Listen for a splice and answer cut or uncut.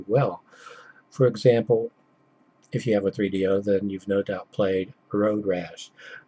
cut